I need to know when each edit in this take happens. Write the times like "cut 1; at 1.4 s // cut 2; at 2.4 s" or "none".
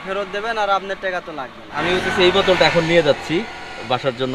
cut 1; at 1.6 s

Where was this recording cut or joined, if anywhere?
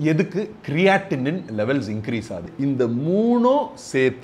cut 1; at 2.5 s

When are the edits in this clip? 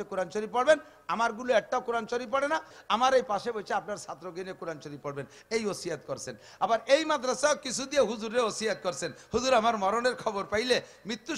cut 1; at 2.7 s

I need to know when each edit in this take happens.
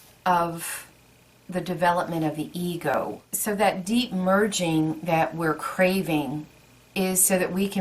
cut 1; at 2.9 s

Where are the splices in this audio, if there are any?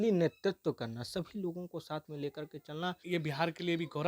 cut 1; at 3.0 s

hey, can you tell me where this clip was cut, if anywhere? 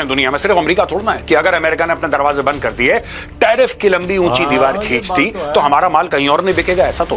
none

